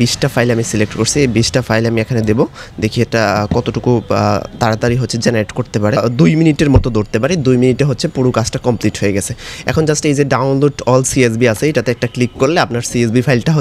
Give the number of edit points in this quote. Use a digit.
1